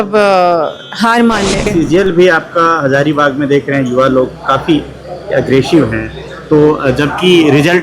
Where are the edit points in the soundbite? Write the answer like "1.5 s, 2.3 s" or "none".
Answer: 1.7 s